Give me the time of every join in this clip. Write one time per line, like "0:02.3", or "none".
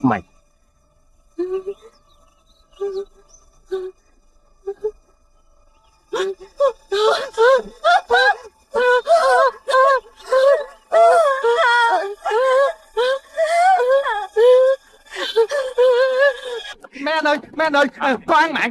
0:16.6